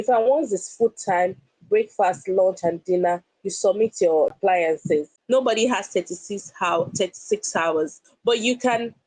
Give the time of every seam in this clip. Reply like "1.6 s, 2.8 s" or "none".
5.1 s